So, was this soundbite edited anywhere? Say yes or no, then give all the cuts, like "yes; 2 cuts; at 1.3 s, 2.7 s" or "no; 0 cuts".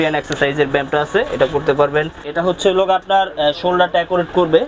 yes; 1 cut; at 2.2 s